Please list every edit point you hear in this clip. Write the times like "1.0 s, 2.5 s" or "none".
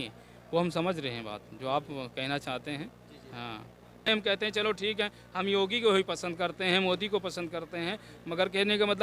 4.0 s